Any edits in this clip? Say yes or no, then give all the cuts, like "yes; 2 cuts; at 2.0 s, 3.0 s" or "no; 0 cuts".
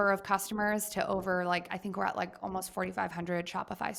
no; 0 cuts